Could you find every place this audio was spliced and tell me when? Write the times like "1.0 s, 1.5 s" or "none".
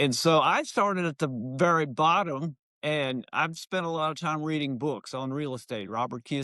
none